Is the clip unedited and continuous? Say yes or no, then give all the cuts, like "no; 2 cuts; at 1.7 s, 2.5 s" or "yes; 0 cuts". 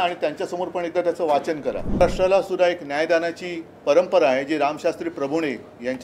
no; 1 cut; at 2.0 s